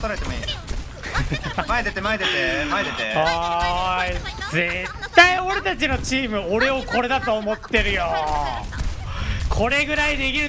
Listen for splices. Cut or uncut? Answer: uncut